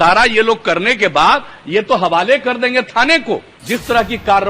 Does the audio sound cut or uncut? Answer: cut